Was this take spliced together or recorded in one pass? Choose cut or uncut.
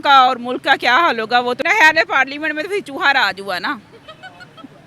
cut